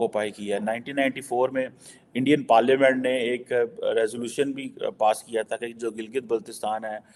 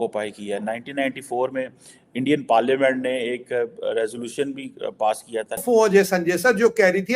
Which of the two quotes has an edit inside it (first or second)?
second